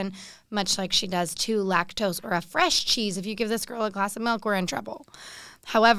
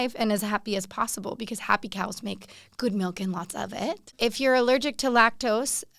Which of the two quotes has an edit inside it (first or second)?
second